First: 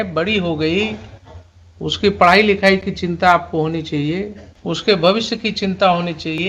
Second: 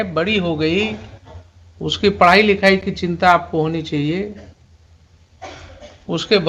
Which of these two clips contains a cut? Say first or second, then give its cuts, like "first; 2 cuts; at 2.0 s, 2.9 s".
first; 1 cut; at 4.5 s